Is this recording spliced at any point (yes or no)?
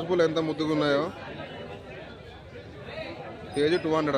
no